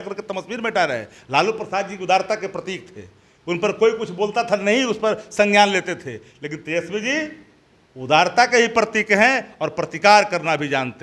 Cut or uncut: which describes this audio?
uncut